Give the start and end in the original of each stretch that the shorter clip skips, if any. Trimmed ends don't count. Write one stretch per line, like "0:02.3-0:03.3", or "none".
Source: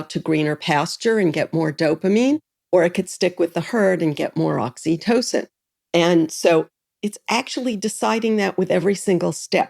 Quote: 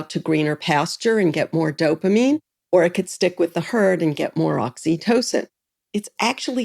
0:05.7-0:06.8